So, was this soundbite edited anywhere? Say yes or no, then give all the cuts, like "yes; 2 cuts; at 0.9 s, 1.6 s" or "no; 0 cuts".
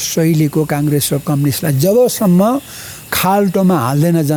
no; 0 cuts